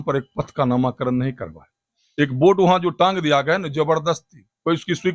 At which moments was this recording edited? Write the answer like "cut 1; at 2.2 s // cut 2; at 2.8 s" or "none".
none